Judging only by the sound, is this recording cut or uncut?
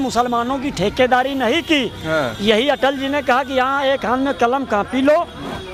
uncut